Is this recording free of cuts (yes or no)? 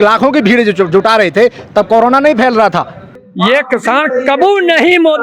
no